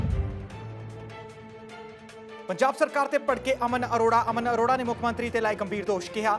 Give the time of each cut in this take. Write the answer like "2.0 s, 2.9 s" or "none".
2.5 s

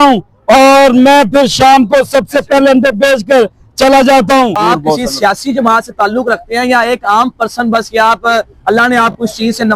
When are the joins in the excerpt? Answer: 4.6 s

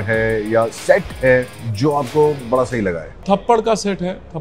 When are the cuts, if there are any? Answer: 1.6 s, 3.2 s

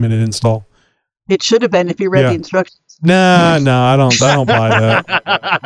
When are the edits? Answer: none

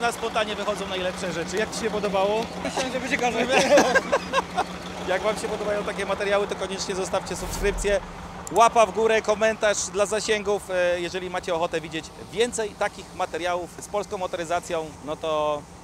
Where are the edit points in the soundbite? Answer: 2.7 s, 4.9 s, 13.9 s, 15.0 s

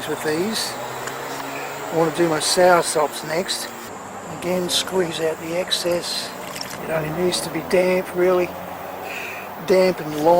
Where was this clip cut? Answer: 3.9 s, 6.8 s

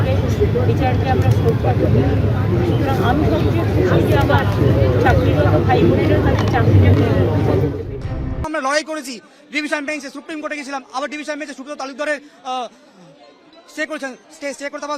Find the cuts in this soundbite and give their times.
8.4 s

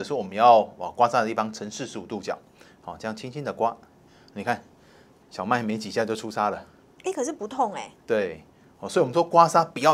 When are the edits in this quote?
none

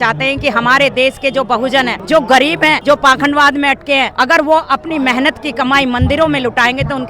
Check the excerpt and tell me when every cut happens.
2.0 s, 2.8 s, 4.1 s

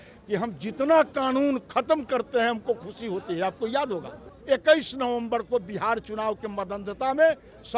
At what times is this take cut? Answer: 4.3 s

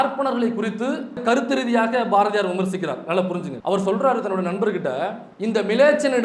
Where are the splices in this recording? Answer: 1.2 s, 3.5 s, 5.3 s

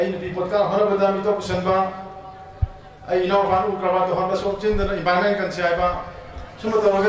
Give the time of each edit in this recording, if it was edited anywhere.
none

